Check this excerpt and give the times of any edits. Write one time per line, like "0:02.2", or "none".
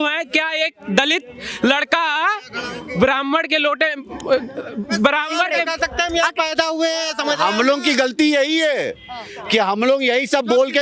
none